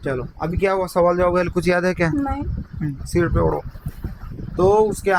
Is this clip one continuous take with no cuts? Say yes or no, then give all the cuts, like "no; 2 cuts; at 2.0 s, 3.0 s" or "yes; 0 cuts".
yes; 0 cuts